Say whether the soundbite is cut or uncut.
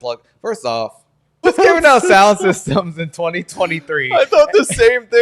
cut